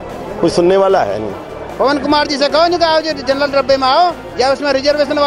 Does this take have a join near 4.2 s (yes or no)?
no